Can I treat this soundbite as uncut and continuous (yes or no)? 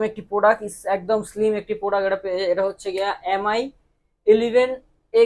yes